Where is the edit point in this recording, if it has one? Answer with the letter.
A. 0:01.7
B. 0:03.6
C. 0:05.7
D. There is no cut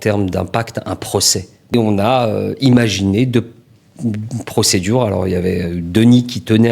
A